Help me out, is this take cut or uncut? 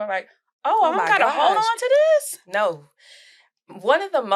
uncut